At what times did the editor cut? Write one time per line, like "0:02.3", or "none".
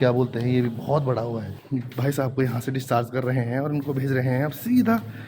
0:01.6